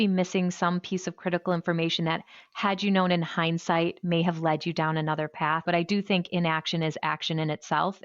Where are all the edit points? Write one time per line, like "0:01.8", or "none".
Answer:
0:05.6